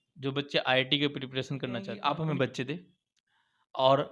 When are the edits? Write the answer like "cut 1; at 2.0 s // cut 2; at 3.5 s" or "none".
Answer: cut 1; at 1.9 s